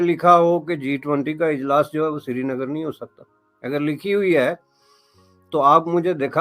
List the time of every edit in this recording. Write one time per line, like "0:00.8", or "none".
none